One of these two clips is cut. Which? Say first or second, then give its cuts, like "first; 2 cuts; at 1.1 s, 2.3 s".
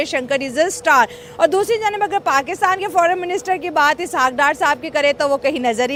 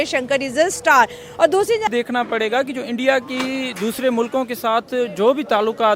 second; 1 cut; at 1.9 s